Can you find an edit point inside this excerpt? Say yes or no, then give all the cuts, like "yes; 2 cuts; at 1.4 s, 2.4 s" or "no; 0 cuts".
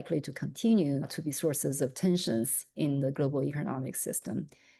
no; 0 cuts